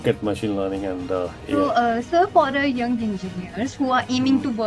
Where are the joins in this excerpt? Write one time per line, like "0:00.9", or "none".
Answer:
0:01.4